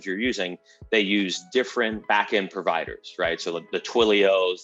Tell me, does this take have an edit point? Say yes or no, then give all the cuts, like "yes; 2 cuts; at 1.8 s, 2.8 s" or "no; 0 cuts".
yes; 1 cut; at 2.0 s